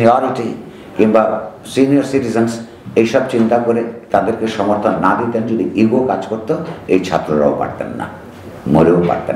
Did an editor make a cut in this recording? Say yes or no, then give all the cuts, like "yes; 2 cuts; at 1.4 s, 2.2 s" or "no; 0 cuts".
no; 0 cuts